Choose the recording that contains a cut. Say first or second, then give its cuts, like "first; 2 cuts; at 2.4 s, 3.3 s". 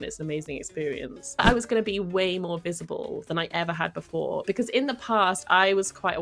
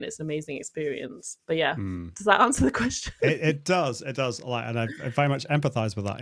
first; 1 cut; at 1.4 s